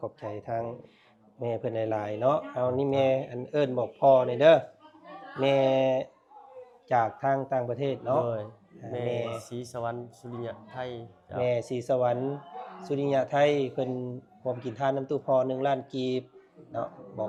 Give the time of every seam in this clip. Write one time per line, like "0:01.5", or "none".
none